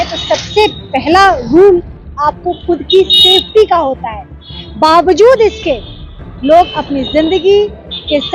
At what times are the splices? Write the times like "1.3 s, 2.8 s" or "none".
none